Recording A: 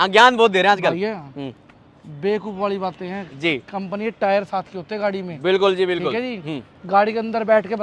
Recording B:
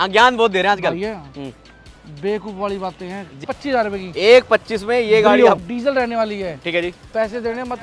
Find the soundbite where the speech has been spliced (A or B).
B